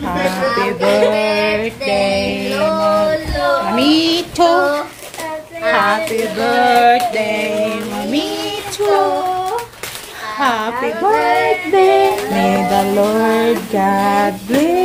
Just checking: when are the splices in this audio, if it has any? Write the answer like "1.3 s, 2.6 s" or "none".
12.2 s